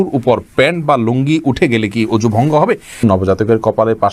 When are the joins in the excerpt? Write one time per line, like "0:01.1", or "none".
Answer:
0:03.0